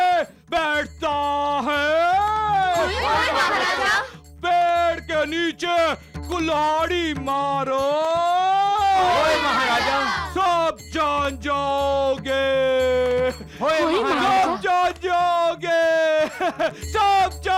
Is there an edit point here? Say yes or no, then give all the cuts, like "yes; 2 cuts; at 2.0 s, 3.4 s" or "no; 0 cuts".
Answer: no; 0 cuts